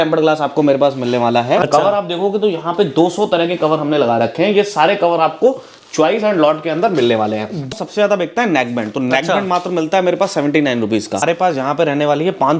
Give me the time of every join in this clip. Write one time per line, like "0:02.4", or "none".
0:01.7
0:07.7
0:11.2